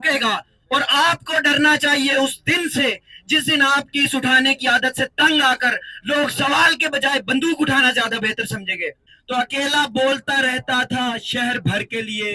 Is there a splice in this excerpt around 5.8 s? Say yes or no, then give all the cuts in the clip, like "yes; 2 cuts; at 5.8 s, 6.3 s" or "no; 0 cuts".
no; 1 cut; at 9.0 s